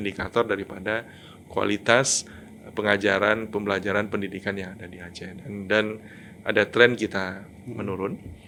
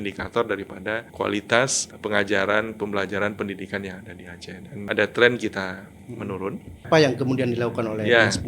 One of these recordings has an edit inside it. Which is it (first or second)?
second